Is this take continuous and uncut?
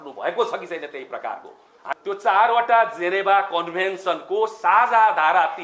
no; 1 cut; at 1.9 s

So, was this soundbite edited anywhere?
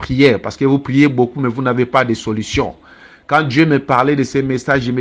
no; 0 cuts

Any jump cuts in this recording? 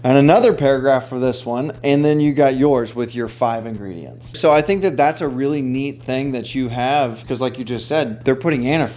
yes; 3 cuts; at 4.3 s, 7.2 s, 8.2 s

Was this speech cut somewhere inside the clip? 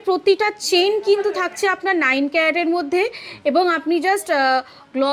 no; 0 cuts

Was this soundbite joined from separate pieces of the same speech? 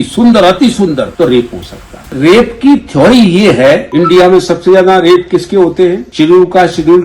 yes; 3 cuts; at 1.1 s, 2.0 s, 3.9 s

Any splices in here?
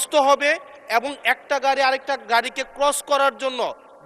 no; 0 cuts

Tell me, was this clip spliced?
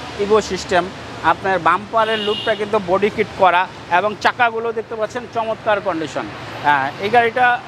no; 0 cuts

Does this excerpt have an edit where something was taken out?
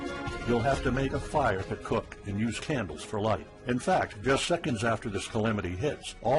yes; 1 cut; at 2.9 s

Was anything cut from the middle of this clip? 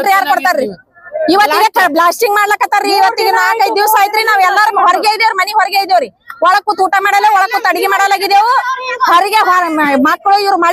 no; 0 cuts

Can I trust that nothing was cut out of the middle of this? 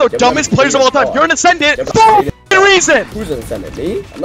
no; 2 cuts; at 1.8 s, 3.1 s

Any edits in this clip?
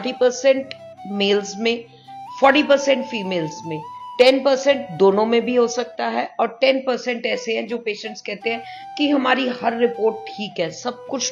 no; 0 cuts

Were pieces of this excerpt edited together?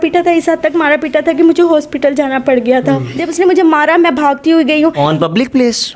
yes; 1 cut; at 3.2 s

